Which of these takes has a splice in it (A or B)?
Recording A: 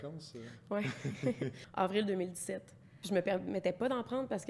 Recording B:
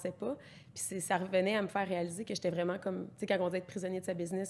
A